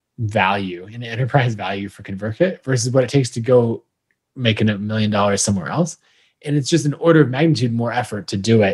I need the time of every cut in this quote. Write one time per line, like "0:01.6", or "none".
none